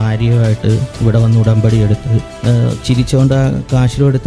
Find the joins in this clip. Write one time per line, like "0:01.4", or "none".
0:02.3